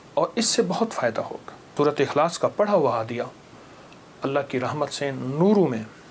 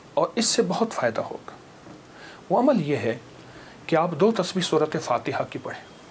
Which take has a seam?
first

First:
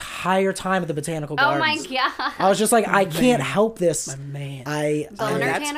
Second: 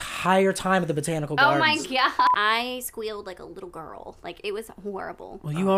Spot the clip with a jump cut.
second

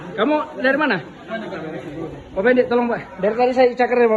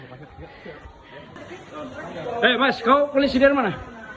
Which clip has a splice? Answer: second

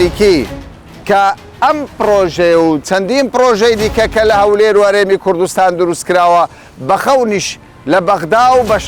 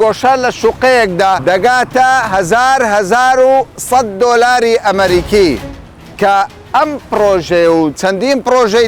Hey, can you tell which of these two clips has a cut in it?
second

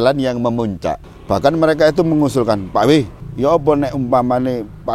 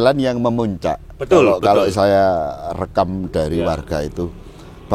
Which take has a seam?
first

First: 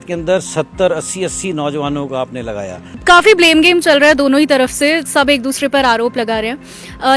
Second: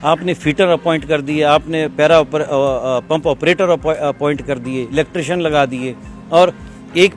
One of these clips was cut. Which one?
first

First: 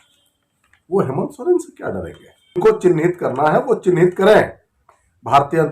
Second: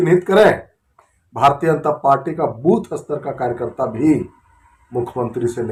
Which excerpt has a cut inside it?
first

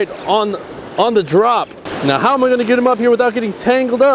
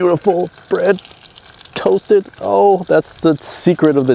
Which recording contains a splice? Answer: first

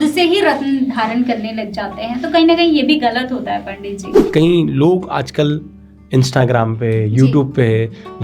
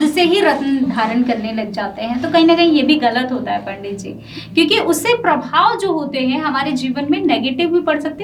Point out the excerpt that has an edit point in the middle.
first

